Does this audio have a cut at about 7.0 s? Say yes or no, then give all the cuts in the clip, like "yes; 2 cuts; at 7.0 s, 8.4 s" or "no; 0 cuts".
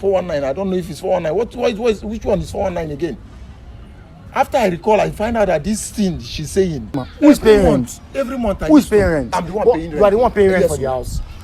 yes; 1 cut; at 7.0 s